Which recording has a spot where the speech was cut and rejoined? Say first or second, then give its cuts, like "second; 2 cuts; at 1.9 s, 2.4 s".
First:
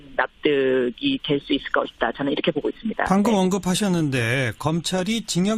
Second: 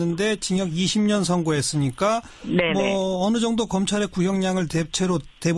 first; 1 cut; at 3.3 s